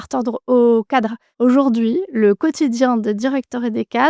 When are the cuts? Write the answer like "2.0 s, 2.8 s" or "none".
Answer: 1.2 s